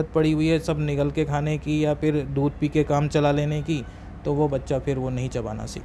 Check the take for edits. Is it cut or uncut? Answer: uncut